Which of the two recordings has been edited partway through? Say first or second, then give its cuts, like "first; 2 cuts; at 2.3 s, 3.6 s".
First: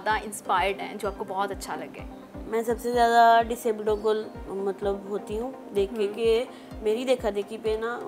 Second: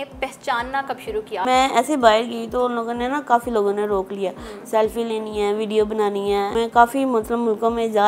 second; 2 cuts; at 1.4 s, 6.5 s